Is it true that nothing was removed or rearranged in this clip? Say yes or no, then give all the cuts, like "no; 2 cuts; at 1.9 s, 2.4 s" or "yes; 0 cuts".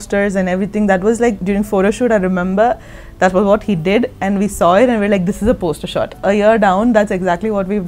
no; 2 cuts; at 1.4 s, 6.1 s